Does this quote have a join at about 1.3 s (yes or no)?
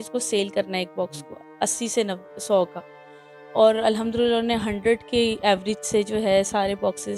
no